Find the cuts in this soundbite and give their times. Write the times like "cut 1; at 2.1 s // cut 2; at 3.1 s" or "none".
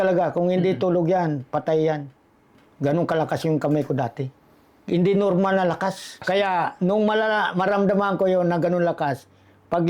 cut 1; at 6.2 s